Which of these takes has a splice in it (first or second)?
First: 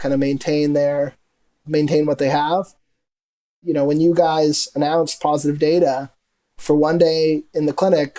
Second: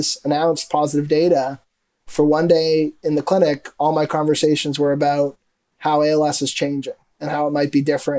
first